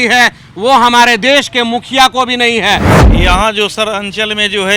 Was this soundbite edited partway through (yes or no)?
yes